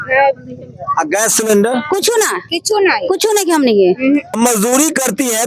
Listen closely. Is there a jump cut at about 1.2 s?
no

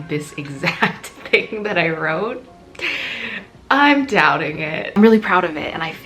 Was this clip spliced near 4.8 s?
yes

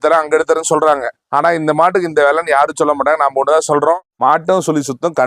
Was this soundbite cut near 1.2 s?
no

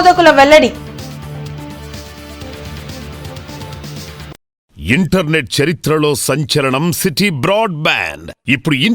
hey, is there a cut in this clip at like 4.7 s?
yes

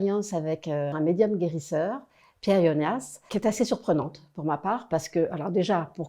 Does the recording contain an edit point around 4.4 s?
no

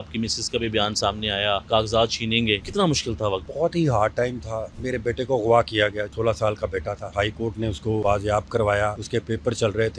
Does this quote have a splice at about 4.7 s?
yes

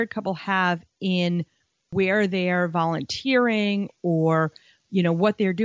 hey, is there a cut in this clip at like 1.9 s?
yes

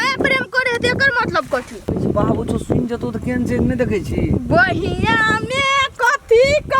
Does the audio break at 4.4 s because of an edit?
no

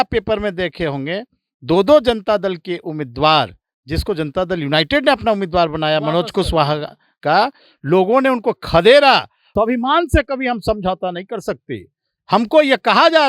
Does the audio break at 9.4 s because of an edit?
yes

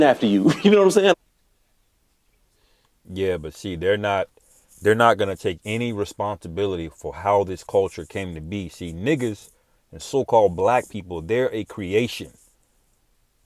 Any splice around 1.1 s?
no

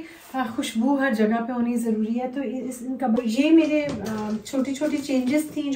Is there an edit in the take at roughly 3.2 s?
yes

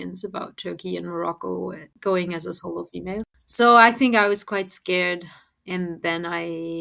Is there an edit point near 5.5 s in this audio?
no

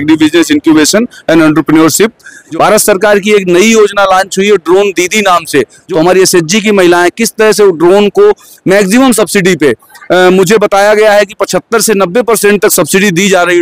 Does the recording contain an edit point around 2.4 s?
yes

